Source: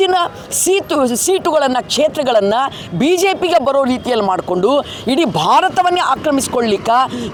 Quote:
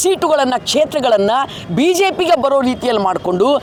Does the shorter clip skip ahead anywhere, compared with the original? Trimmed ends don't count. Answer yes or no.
no